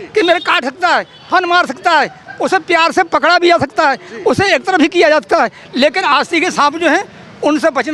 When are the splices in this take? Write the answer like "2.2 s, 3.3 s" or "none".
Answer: none